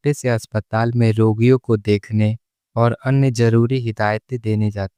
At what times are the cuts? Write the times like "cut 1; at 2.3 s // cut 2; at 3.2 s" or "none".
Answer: none